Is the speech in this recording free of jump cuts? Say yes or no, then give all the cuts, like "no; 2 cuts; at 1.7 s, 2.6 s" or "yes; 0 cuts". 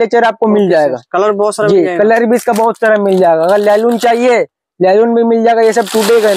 yes; 0 cuts